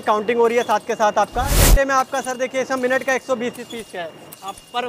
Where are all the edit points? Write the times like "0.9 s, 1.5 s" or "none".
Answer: 1.6 s